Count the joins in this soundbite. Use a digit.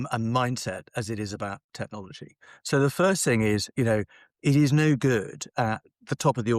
0